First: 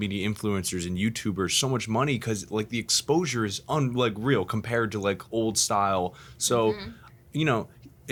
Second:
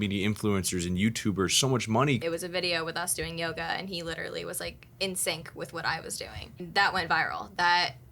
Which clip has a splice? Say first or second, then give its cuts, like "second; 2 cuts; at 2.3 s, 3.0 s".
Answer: second; 2 cuts; at 2.2 s, 6.6 s